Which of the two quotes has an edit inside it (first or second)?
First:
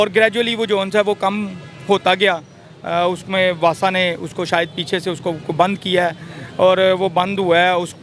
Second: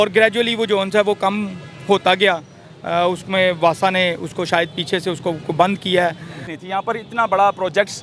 second